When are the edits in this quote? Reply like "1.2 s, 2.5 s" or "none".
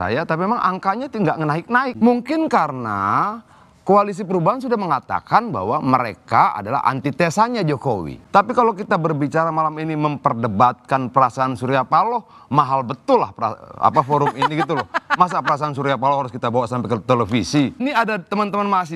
1.9 s, 8.1 s, 17.8 s